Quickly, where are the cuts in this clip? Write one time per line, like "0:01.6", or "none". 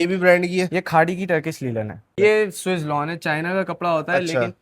0:02.2